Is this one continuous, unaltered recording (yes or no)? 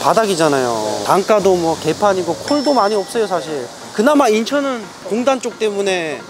no